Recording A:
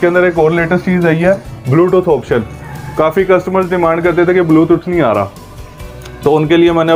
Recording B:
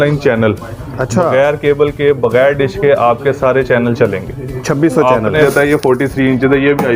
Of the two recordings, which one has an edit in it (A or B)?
B